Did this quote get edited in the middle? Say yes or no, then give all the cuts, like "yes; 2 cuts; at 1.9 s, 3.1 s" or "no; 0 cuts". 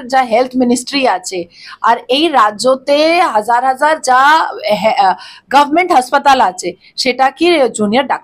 no; 0 cuts